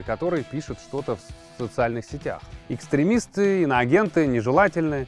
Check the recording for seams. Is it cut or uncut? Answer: cut